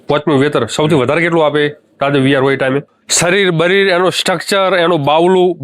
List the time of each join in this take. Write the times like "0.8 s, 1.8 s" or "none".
3.0 s